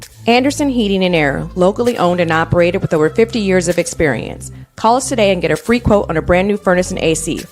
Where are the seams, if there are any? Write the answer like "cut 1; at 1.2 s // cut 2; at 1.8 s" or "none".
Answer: cut 1; at 5.8 s